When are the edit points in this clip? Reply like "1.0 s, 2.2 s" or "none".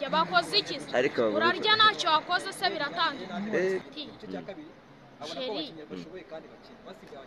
3.8 s